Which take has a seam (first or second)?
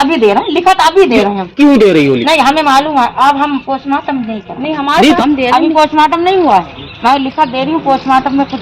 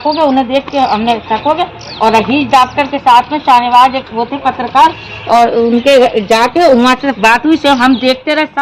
first